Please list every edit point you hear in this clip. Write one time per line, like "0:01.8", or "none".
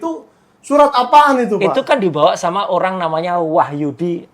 none